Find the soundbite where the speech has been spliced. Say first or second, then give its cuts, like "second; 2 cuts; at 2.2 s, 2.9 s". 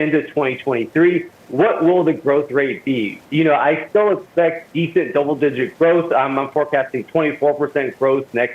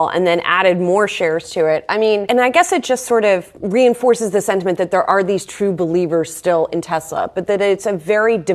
second; 2 cuts; at 2.2 s, 3.5 s